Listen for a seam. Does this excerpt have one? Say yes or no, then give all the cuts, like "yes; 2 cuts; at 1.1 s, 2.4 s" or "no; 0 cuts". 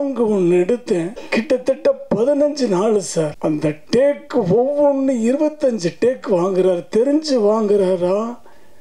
yes; 2 cuts; at 1.2 s, 3.3 s